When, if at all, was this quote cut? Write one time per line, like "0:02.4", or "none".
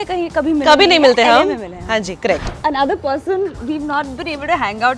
0:02.5